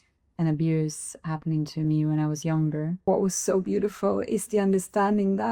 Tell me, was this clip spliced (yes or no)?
yes